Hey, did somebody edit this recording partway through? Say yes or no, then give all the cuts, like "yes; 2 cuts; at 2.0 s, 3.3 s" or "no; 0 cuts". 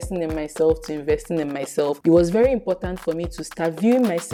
no; 0 cuts